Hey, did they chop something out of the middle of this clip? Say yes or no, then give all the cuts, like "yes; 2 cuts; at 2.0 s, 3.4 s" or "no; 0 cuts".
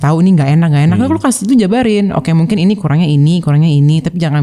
no; 0 cuts